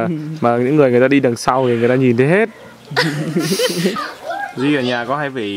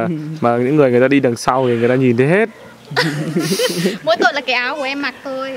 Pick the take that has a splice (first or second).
first